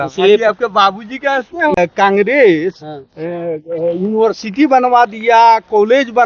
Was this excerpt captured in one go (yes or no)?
no